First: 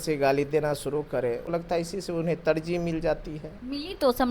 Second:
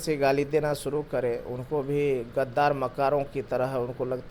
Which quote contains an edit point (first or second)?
first